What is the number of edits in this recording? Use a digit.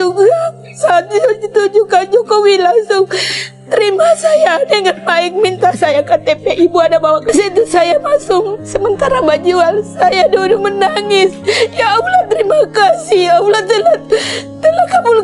1